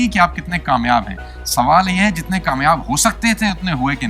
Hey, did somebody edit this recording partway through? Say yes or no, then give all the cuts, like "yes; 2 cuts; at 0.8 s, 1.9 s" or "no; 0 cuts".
no; 0 cuts